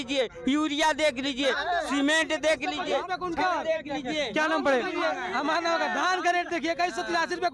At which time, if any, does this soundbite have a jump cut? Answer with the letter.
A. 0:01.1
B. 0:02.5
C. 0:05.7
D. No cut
D